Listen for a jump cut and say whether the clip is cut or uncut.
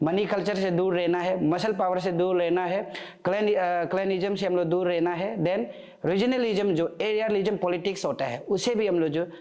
uncut